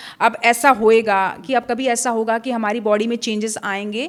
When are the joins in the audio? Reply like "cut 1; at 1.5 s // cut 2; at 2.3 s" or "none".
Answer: none